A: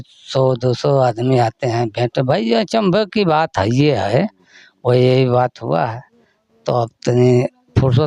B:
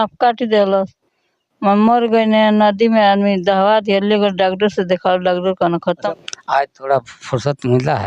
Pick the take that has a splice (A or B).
B